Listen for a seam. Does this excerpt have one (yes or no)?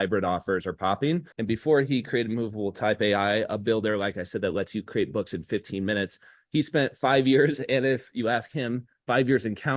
yes